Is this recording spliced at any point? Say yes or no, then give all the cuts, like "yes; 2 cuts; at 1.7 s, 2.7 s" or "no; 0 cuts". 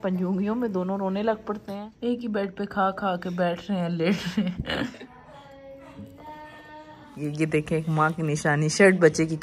yes; 3 cuts; at 2.1 s, 5.0 s, 7.1 s